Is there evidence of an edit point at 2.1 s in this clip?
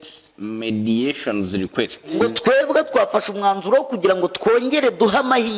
yes; 1 cut; at 2.1 s

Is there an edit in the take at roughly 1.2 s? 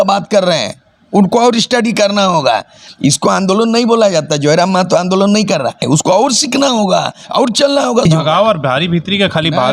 no; 3 cuts; at 2.8 s, 5.8 s, 8.0 s

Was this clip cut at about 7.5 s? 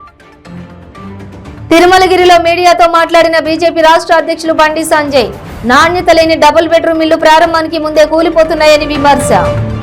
no; 1 cut; at 1.0 s

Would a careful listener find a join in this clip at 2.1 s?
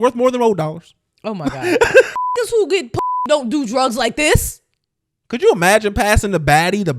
yes; 1 cut; at 2.1 s

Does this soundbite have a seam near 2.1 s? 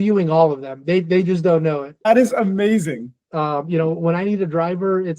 yes; 2 cuts; at 2.1 s, 3.2 s

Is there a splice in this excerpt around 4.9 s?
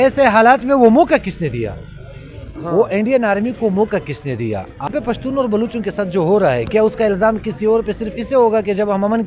yes; 1 cut; at 4.9 s

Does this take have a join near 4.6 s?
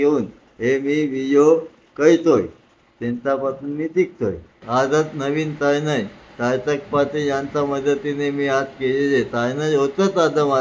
yes; 1 cut; at 4.6 s

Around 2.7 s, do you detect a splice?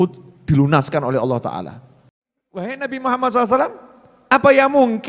yes; 1 cut; at 2.7 s

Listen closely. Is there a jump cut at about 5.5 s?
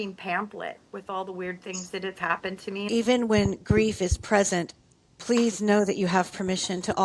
no; 1 cut; at 2.9 s

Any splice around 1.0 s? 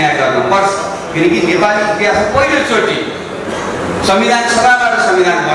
no; 0 cuts

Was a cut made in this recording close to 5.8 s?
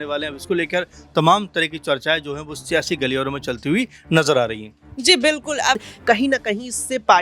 yes; 1 cut; at 5.8 s

